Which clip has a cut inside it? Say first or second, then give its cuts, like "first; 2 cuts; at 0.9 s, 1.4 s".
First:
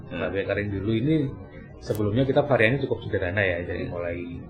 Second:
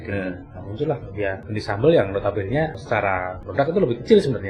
second; 2 cuts; at 1.4 s, 3.2 s